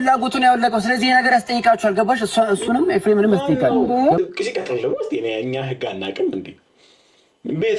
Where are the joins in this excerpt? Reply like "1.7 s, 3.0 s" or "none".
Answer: 4.2 s